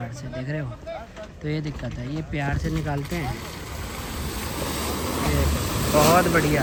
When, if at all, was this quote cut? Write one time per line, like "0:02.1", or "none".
none